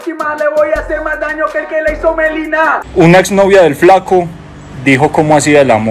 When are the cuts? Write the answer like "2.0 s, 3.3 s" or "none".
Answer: 2.8 s

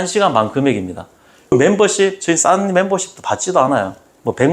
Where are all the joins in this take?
none

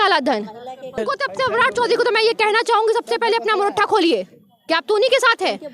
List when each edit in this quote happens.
1.0 s

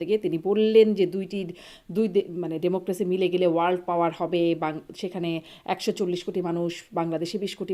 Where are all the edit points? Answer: none

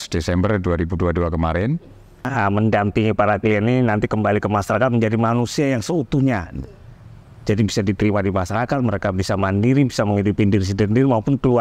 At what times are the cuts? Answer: 2.3 s

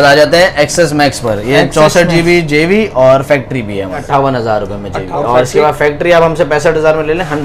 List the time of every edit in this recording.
4.0 s, 5.1 s

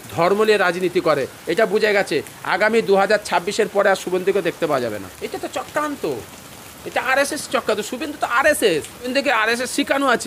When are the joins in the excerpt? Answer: 5.1 s, 9.1 s

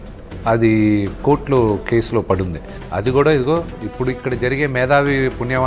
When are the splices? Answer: none

